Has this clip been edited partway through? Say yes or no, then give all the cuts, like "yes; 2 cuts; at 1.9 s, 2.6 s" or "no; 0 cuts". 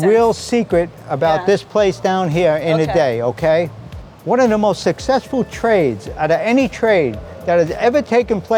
no; 0 cuts